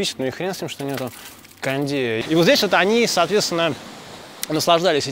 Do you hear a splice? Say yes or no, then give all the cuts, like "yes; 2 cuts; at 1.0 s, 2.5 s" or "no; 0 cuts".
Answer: yes; 1 cut; at 2.2 s